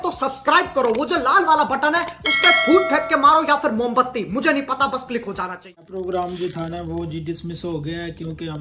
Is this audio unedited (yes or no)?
no